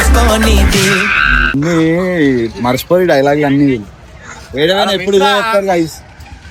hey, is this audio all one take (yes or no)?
yes